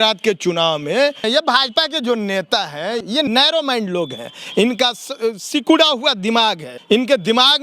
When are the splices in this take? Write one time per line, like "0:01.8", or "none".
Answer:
0:01.2
0:03.2
0:06.7